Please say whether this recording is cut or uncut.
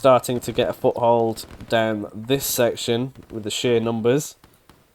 uncut